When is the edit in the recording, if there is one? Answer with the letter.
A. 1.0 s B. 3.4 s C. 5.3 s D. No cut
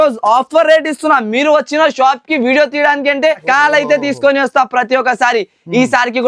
B